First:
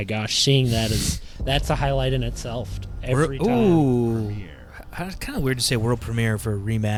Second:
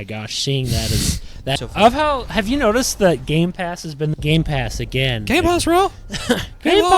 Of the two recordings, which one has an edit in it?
second; 2 cuts; at 1.6 s, 4.1 s

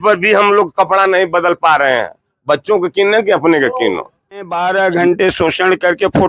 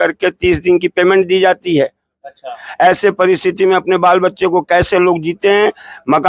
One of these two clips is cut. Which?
first; 1 cut; at 4.5 s

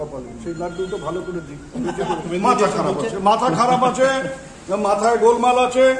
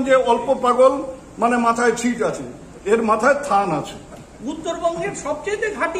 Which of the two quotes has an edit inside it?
first; 1 cut; at 2.2 s

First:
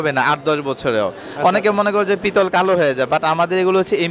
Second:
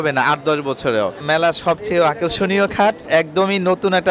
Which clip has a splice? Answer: second; 2 cuts; at 1.2 s, 3.1 s

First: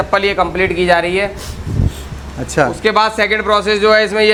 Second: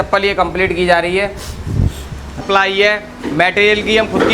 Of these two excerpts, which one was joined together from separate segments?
second; 1 cut; at 2.4 s

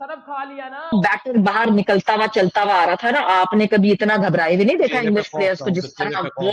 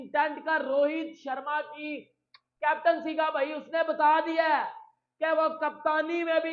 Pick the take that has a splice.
first; 1 cut; at 0.9 s

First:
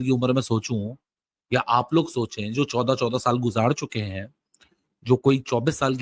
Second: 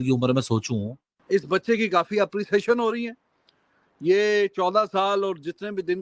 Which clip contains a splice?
second; 1 cut; at 1.2 s

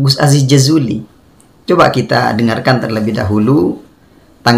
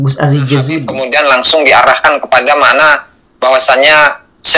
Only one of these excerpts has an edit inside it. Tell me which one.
second; 1 cut; at 0.9 s

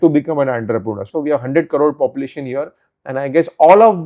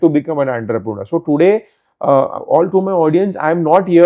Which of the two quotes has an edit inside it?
first; 1 cut; at 1.0 s

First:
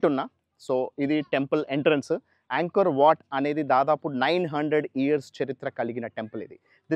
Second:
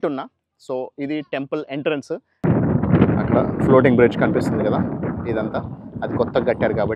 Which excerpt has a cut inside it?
second; 1 cut; at 2.3 s

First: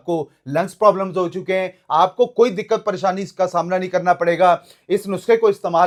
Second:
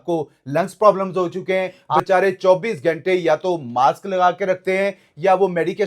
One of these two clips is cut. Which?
second; 1 cut; at 2.0 s

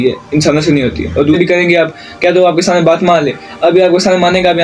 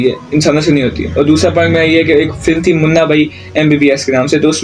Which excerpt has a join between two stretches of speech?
first; 1 cut; at 1.4 s

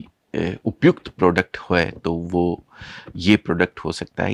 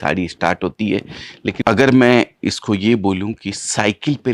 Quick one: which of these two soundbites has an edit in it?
second; 1 cut; at 1.6 s

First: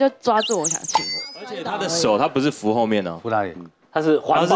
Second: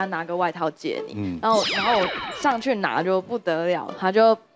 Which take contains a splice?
first; 1 cut; at 1.6 s

